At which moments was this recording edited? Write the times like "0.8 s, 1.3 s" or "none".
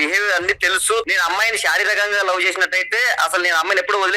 1.1 s